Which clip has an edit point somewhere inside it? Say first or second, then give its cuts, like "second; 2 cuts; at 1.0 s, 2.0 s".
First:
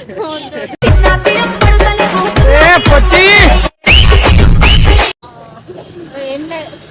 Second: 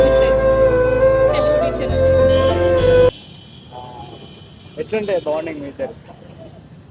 first; 1 cut; at 5.2 s